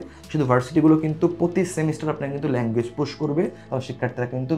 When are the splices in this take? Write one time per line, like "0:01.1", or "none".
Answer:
0:03.6